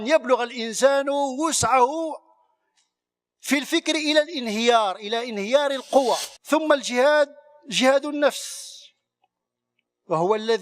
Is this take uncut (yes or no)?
no